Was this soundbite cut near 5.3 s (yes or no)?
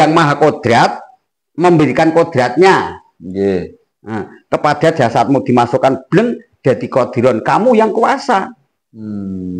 no